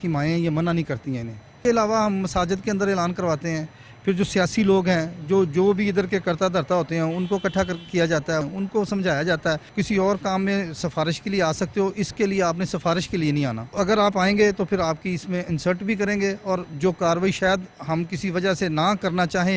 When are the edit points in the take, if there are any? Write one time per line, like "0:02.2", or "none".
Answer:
0:01.6
0:08.5
0:09.7
0:13.7
0:16.7